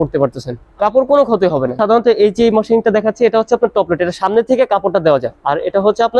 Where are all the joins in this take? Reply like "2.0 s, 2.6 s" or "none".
1.8 s